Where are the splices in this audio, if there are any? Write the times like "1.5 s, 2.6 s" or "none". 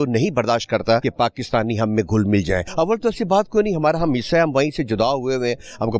1.1 s, 2.7 s